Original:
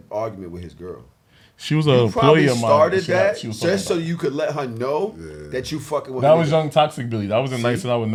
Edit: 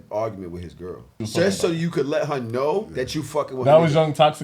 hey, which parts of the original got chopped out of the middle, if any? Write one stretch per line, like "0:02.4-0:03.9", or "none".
0:01.2-0:03.5
0:05.2-0:05.5